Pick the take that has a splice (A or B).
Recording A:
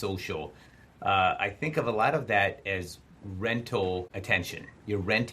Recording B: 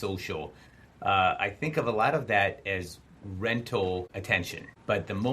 B